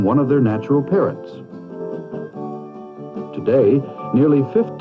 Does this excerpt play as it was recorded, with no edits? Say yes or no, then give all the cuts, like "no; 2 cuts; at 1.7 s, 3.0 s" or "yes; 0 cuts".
yes; 0 cuts